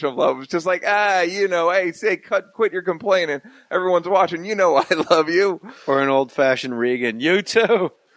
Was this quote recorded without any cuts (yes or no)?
yes